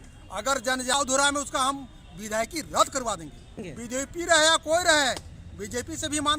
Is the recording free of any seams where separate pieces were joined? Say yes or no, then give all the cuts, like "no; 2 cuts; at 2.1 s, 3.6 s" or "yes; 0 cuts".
no; 2 cuts; at 0.9 s, 3.7 s